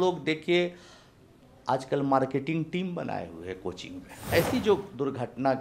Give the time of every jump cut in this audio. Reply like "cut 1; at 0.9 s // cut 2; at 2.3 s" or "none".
cut 1; at 4.1 s